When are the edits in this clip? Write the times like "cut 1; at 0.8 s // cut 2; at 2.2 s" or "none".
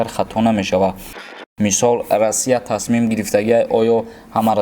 cut 1; at 1.2 s